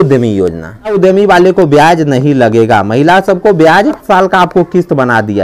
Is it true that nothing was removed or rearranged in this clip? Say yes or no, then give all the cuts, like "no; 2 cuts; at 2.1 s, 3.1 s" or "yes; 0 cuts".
no; 2 cuts; at 1.0 s, 4.0 s